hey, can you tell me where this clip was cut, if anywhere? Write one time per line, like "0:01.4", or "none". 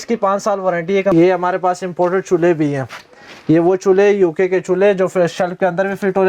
0:01.1